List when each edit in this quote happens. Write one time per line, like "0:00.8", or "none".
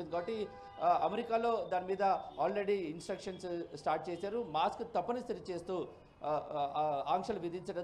0:02.8